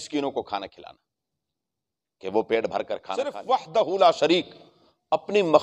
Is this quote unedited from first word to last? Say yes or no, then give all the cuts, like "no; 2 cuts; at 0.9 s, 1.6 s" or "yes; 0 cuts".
no; 1 cut; at 3.4 s